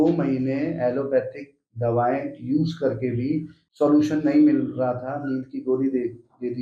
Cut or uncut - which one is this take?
cut